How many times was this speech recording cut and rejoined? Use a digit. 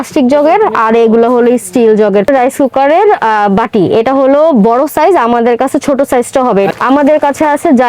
2